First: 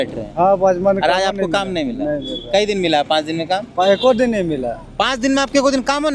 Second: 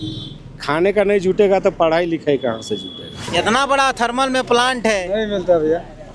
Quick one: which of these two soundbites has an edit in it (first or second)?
second